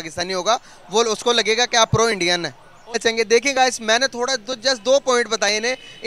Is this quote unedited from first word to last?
no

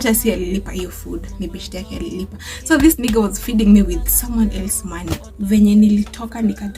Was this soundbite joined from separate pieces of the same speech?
yes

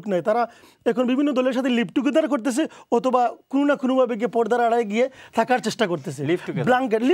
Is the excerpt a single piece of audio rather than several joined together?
yes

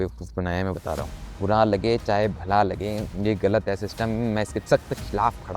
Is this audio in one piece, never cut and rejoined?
no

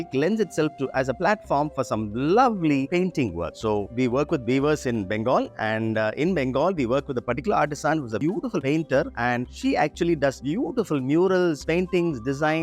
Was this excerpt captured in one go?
yes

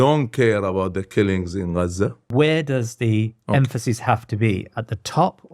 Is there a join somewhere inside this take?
yes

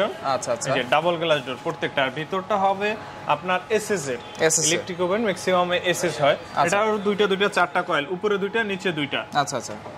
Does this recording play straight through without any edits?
yes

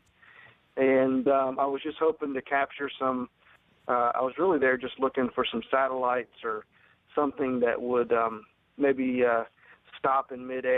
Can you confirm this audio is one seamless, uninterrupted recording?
yes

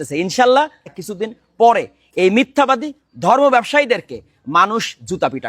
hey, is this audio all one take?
no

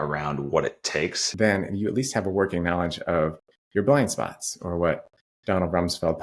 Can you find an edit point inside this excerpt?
yes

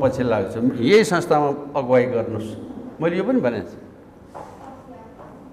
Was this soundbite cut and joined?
no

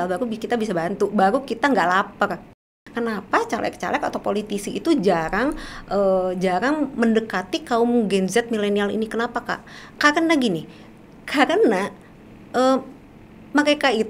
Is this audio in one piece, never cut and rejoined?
no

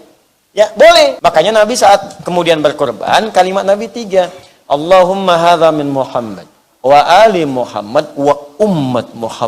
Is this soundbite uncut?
no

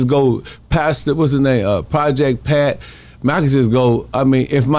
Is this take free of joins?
yes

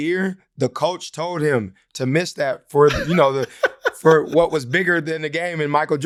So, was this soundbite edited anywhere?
no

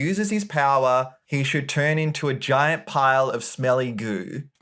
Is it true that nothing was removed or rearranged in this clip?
yes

